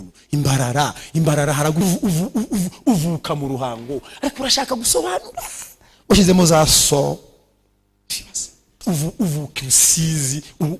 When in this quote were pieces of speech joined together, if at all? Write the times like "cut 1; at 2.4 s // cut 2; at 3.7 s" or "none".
cut 1; at 1.8 s // cut 2; at 8.8 s